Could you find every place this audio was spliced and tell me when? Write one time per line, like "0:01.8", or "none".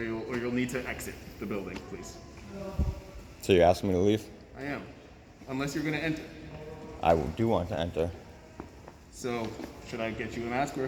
none